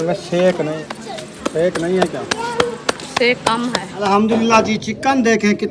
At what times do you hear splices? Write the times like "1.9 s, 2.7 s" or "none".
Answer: 0.8 s, 3.9 s